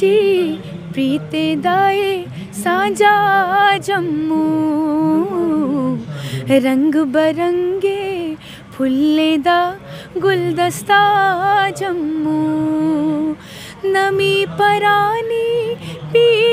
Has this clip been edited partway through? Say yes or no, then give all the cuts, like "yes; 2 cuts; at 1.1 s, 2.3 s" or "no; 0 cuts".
no; 0 cuts